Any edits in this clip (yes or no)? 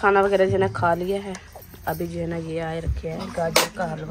no